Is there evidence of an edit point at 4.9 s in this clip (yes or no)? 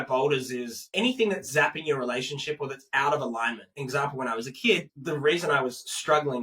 yes